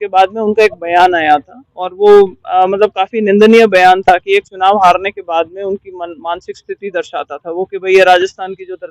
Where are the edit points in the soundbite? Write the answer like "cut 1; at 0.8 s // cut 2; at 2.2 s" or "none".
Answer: none